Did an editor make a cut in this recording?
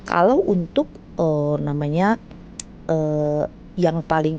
no; 0 cuts

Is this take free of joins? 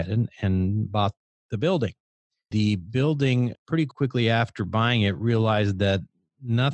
no; 1 cut; at 3.9 s

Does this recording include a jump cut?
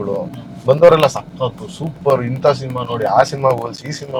no; 0 cuts

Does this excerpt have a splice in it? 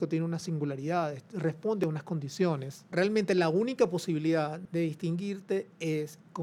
yes; 2 cuts; at 2.9 s, 4.6 s

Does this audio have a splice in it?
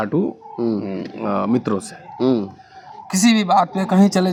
no; 0 cuts

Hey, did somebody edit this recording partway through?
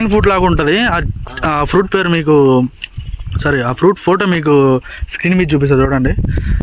no; 0 cuts

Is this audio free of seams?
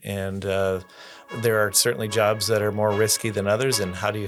yes; 0 cuts

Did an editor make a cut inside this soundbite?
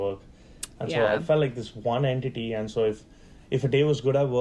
no; 0 cuts

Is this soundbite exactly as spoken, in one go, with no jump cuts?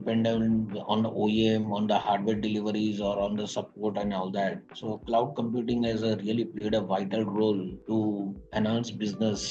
yes; 0 cuts

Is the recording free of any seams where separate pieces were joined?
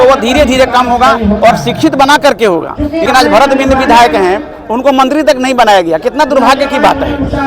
no; 1 cut; at 3.1 s

